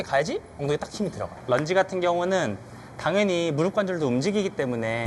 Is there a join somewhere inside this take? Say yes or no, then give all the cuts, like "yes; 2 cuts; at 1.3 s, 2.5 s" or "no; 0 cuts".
yes; 1 cut; at 1.3 s